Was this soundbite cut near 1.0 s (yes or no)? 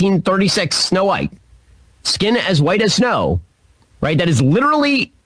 yes